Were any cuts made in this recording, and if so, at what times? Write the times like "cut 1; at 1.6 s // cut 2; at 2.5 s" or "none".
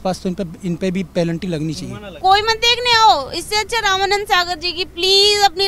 cut 1; at 2.2 s